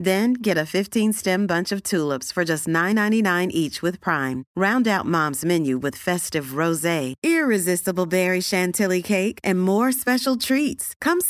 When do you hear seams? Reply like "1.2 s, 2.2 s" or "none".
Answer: none